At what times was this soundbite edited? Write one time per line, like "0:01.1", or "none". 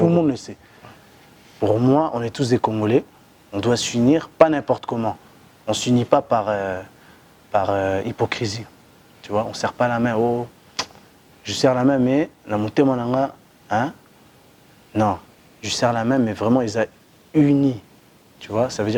none